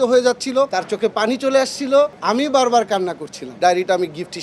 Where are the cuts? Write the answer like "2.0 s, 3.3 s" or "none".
3.5 s